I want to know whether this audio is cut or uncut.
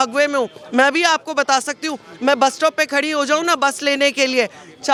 uncut